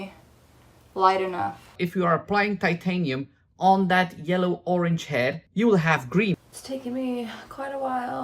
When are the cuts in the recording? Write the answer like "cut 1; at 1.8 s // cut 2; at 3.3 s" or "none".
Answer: cut 1; at 1.7 s // cut 2; at 6.3 s